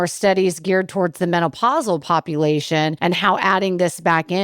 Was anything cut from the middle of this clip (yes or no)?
yes